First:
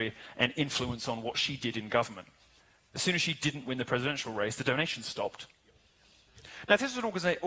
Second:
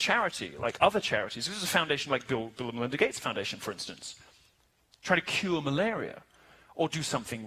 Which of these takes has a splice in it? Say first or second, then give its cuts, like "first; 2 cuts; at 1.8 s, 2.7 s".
second; 1 cut; at 5.7 s